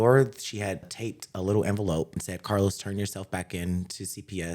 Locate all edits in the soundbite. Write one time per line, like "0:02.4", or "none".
0:00.9
0:02.3